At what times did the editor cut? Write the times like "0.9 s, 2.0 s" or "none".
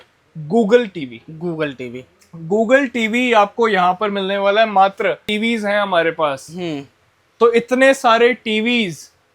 5.3 s